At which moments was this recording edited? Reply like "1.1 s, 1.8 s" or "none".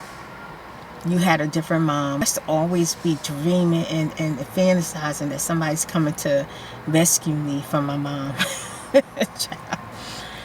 2.2 s